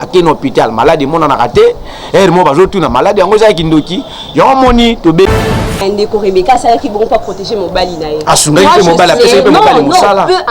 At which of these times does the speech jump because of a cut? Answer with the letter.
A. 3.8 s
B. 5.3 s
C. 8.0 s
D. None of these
B